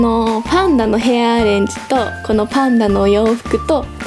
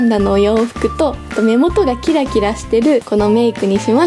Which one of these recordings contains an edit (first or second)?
second